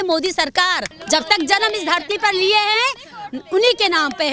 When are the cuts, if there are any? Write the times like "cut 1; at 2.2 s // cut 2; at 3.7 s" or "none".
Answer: cut 1; at 0.9 s